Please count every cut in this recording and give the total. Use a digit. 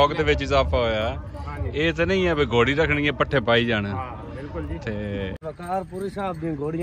1